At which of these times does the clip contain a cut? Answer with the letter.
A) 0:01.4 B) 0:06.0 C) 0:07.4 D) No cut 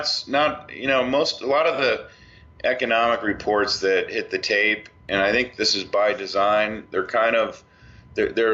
C